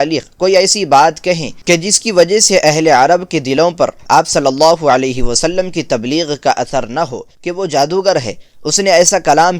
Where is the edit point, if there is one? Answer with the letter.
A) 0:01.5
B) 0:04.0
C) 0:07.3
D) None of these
C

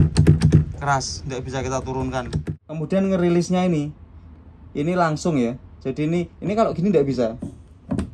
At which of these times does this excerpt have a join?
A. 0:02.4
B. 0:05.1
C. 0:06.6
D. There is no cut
A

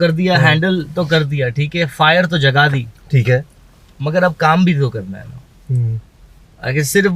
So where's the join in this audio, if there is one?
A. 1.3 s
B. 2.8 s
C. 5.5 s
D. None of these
D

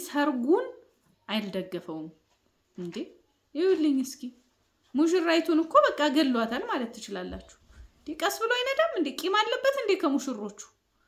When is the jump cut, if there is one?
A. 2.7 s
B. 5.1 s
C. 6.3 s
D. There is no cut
D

